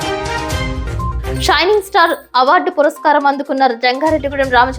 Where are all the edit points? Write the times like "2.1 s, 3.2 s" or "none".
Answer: 1.2 s